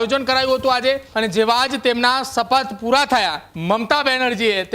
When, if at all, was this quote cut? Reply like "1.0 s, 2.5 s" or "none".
1.1 s, 3.5 s